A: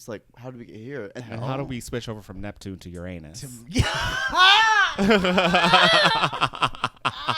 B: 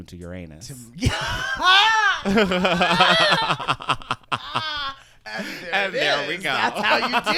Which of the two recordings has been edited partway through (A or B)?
A